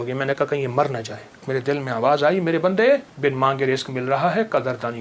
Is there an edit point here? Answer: yes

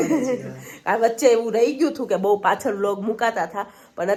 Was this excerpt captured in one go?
yes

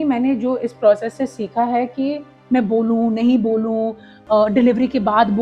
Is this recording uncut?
no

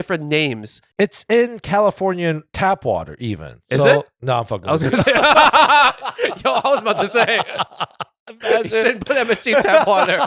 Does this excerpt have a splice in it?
no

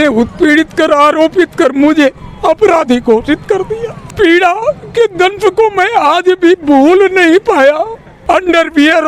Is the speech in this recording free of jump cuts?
no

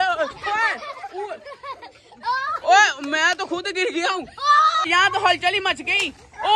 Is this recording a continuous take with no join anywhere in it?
no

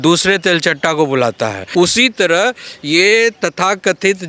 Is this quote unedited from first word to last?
no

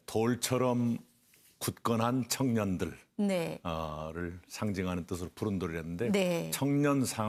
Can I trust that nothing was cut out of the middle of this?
yes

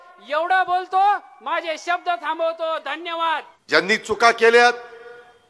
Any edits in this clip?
yes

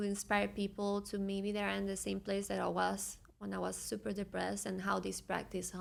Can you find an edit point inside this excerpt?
no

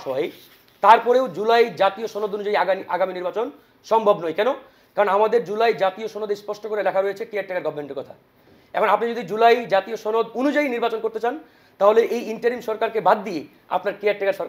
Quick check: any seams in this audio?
no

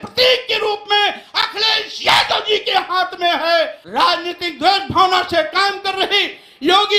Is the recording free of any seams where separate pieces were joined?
no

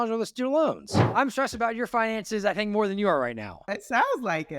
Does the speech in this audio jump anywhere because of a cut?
yes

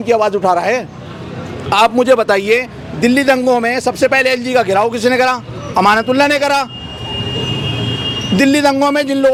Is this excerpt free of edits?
yes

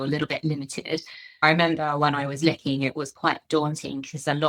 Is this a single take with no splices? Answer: no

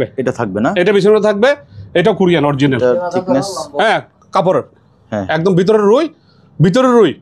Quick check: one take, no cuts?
yes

